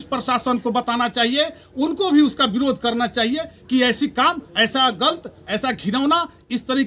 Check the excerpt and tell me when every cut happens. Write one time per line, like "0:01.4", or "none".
none